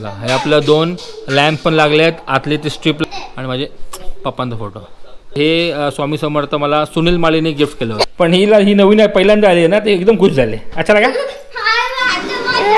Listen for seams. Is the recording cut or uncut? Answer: cut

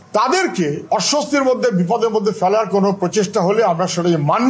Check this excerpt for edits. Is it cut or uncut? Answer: uncut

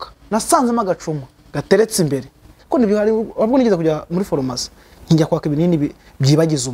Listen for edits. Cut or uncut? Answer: cut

